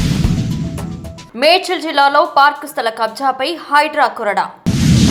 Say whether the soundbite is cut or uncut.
uncut